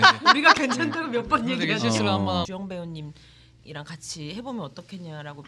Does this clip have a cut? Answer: yes; 1 cut; at 2.5 s

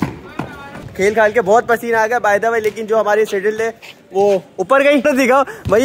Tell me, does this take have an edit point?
yes; 2 cuts; at 0.9 s, 5.0 s

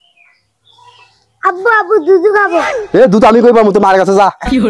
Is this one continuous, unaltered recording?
yes; 0 cuts

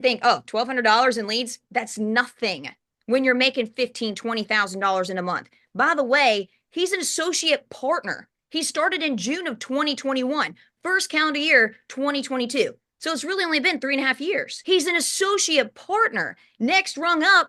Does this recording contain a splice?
no; 0 cuts

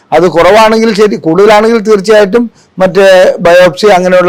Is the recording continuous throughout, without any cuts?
yes; 0 cuts

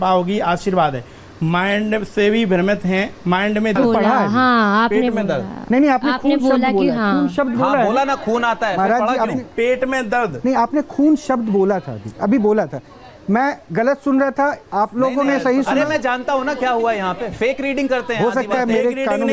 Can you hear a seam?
yes; 1 cut; at 3.8 s

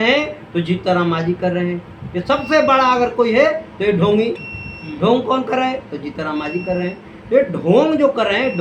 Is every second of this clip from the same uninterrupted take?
yes; 0 cuts

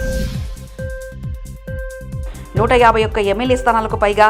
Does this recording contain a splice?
no; 0 cuts

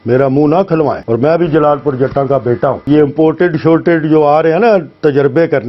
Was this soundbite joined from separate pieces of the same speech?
yes; 2 cuts; at 1.0 s, 2.8 s

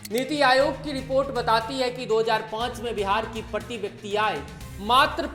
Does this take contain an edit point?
no; 0 cuts

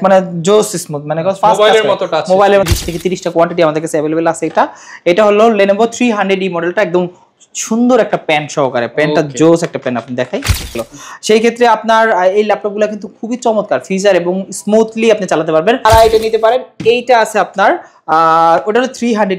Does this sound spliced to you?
yes; 3 cuts; at 2.7 s, 10.8 s, 15.8 s

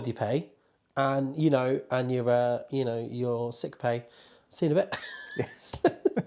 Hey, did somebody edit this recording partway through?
no; 0 cuts

